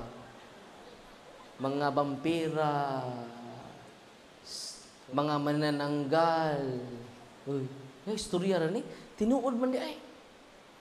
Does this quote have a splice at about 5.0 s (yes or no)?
yes